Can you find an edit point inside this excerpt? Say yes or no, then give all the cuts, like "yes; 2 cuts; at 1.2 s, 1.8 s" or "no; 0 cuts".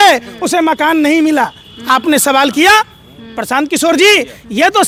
no; 0 cuts